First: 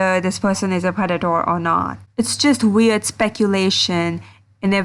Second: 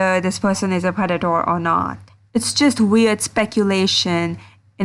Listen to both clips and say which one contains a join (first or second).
first